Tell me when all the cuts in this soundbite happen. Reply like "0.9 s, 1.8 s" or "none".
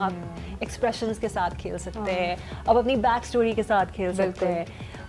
none